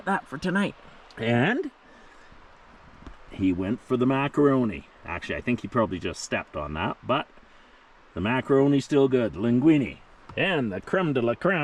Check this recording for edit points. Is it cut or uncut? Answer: uncut